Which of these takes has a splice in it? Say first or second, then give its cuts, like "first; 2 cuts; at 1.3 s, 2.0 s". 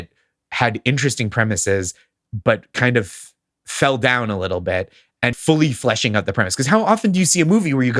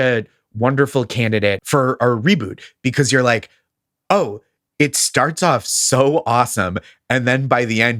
first; 1 cut; at 5.4 s